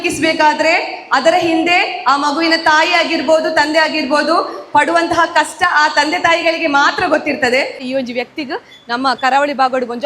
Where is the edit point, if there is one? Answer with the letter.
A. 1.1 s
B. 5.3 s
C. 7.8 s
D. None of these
C